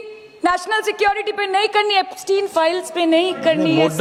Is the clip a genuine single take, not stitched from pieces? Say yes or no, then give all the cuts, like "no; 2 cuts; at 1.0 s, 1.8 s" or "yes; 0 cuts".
yes; 0 cuts